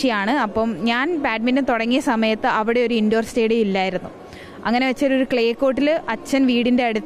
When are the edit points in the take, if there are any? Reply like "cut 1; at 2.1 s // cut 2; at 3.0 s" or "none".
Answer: none